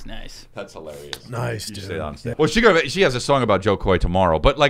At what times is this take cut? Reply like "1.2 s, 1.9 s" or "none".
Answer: 2.3 s